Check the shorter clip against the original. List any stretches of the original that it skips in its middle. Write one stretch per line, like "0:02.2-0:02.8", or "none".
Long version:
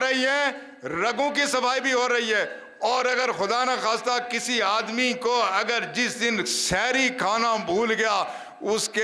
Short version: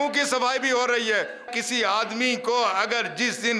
0:02.7-0:04.3